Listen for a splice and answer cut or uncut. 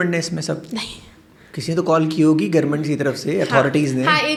uncut